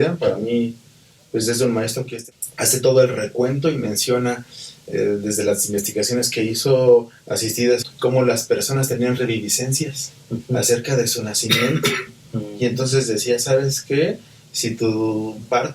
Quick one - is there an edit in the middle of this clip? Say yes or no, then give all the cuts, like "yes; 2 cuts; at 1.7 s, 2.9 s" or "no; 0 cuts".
yes; 2 cuts; at 2.1 s, 7.9 s